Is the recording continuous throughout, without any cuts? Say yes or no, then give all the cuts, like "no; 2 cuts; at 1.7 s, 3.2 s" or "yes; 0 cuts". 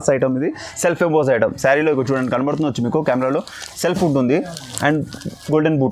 yes; 0 cuts